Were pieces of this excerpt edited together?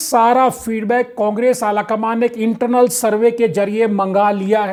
no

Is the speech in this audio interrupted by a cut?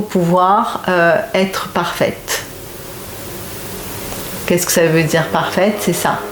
no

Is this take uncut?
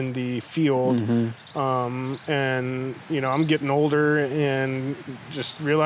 yes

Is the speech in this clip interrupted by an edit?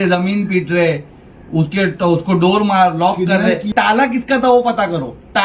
yes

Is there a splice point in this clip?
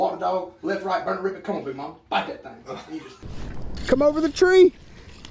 yes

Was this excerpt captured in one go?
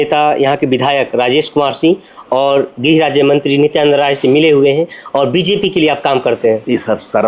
yes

